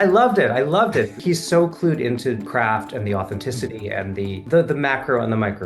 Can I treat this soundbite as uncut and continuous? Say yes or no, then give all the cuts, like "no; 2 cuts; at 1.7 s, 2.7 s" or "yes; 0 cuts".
no; 3 cuts; at 1.2 s, 2.5 s, 4.4 s